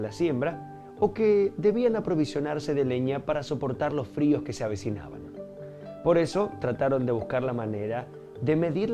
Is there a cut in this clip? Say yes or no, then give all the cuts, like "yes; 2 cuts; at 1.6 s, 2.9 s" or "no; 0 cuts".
no; 0 cuts